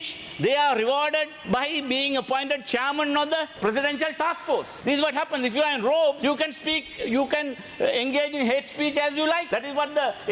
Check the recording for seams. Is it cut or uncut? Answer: cut